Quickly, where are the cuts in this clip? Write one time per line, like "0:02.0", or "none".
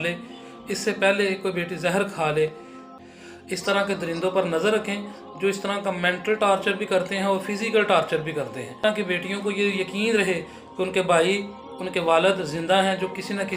0:02.8
0:08.8